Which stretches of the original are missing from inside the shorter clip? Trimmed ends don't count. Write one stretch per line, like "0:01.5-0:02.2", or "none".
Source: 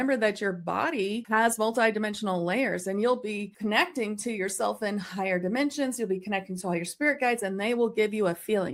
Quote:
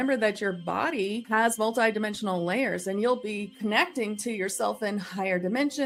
none